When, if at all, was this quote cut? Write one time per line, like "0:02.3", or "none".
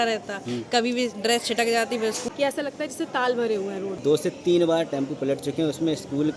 0:02.2
0:04.0